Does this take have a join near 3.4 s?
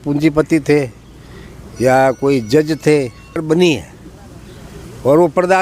yes; 1 cut; at 3.4 s

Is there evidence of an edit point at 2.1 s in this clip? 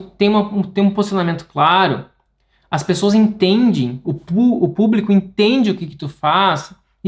no; 0 cuts

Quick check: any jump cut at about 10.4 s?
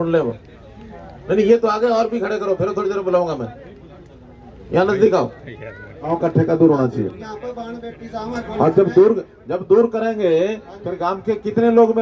no; 1 cut; at 6.1 s

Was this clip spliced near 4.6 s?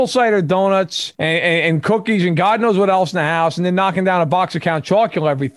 no; 1 cut; at 1.1 s

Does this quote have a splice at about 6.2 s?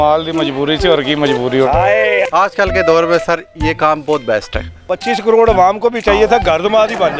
no; 2 cuts; at 2.3 s, 4.7 s

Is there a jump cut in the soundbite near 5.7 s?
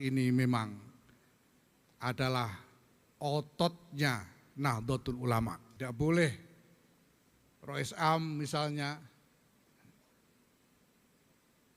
yes; 1 cut; at 5.7 s

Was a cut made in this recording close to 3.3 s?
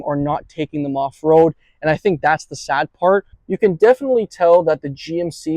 yes; 1 cut; at 3.3 s

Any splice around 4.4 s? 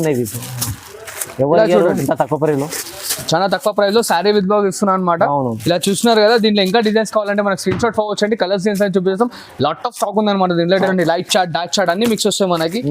no; 1 cut; at 10.7 s

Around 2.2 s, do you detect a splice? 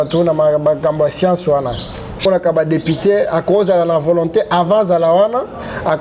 yes; 1 cut; at 2.2 s

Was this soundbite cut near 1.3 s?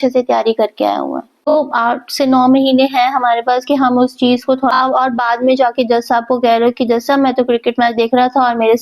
yes; 2 cuts; at 1.3 s, 4.7 s

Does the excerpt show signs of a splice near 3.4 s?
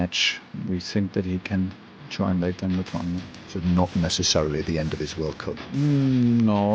no; 0 cuts

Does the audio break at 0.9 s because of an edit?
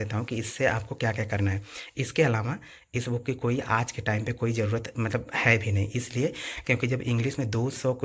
no; 0 cuts

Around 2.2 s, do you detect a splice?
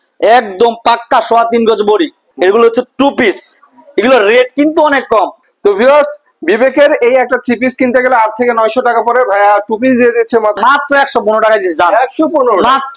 yes; 3 cuts; at 2.2 s, 5.4 s, 10.6 s

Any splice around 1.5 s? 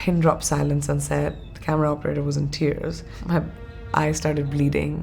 no; 1 cut; at 3.2 s

